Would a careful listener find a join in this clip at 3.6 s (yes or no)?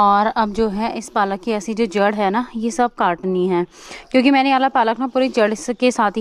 no